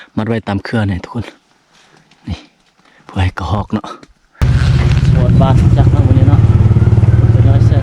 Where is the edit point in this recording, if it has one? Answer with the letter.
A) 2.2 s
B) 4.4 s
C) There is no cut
B